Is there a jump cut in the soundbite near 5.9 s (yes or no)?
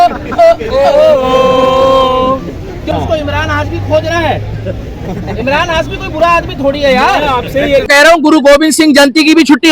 no